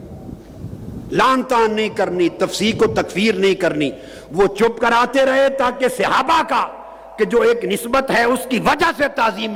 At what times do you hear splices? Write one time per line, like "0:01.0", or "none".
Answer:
none